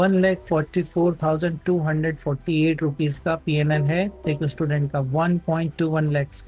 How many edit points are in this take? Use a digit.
1